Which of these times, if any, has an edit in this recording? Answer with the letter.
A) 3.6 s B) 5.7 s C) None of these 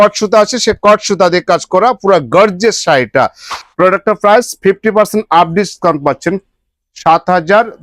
A